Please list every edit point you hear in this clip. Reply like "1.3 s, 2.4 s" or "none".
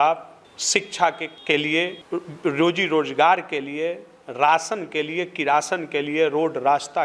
none